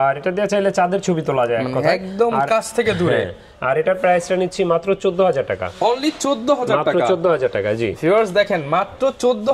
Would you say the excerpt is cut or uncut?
uncut